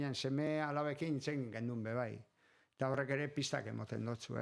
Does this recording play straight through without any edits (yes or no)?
yes